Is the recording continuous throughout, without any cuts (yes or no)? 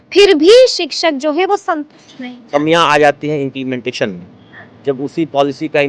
no